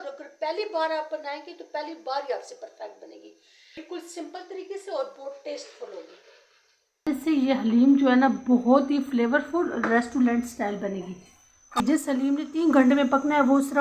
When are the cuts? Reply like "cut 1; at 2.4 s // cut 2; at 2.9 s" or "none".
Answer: cut 1; at 3.8 s // cut 2; at 7.1 s // cut 3; at 11.8 s